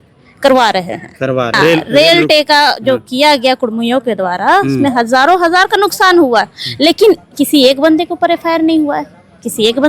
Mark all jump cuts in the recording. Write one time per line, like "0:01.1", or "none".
0:01.6